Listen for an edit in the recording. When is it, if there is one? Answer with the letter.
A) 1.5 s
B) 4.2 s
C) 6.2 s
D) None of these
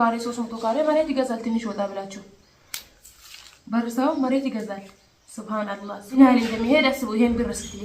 C